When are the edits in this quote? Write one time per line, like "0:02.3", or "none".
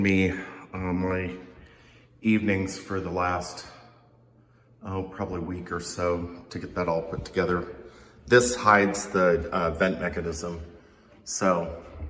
none